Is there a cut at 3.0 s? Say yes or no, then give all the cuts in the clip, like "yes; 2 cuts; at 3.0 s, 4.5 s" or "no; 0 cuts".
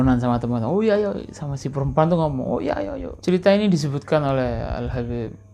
yes; 1 cut; at 3.0 s